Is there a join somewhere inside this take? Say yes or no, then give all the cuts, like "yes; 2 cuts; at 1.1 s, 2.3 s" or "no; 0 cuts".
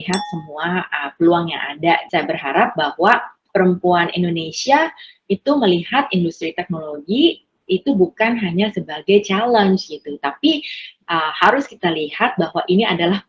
yes; 2 cuts; at 2.0 s, 3.4 s